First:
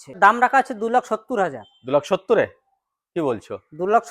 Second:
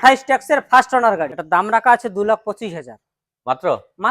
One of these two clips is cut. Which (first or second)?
second